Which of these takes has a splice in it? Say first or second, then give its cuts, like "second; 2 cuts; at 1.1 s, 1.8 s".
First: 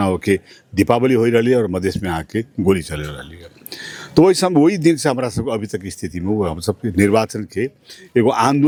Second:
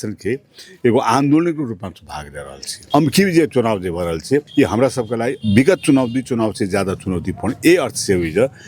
second; 3 cuts; at 2.7 s, 4.5 s, 5.4 s